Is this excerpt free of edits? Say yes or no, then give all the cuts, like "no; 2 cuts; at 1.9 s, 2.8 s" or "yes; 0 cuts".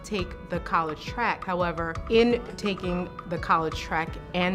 no; 1 cut; at 1.9 s